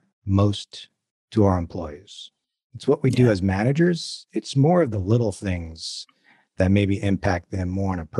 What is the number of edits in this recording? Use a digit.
0